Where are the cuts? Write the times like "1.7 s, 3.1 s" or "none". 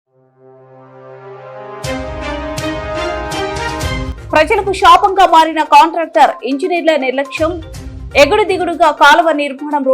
4.1 s